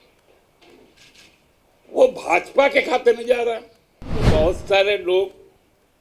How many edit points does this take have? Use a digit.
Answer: 1